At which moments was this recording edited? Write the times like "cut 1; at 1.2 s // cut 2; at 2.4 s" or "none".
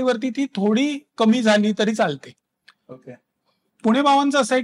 none